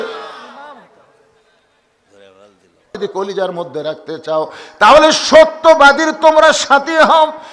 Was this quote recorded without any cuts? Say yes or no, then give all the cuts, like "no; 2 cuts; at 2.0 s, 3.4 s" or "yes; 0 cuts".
no; 1 cut; at 2.9 s